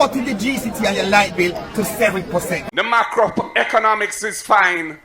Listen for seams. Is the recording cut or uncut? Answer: cut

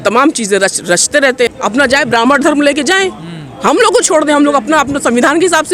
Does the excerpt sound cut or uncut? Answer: cut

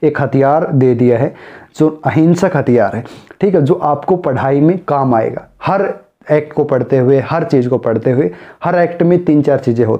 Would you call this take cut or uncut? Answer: uncut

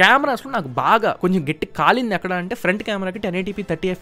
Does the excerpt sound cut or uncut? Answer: uncut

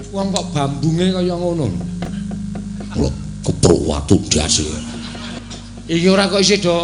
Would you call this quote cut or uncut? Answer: cut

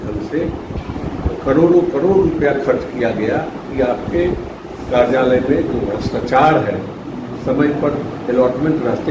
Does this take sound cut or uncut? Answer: cut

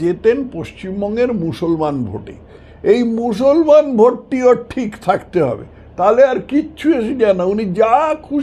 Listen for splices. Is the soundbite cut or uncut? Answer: uncut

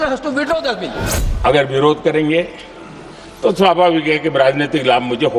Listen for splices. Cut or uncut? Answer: cut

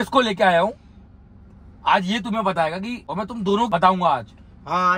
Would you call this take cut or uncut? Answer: uncut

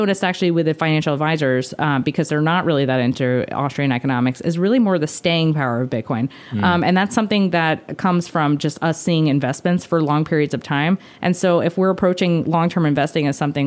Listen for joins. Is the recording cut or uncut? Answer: uncut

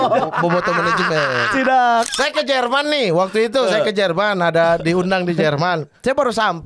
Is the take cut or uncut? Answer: cut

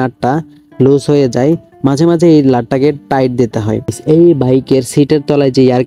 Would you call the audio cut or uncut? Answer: cut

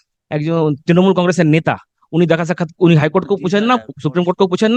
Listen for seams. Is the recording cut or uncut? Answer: uncut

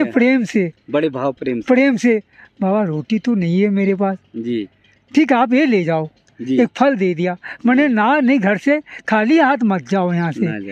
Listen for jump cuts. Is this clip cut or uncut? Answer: uncut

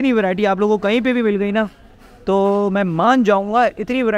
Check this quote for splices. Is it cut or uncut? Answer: uncut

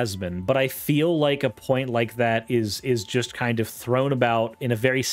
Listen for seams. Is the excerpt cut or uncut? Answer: uncut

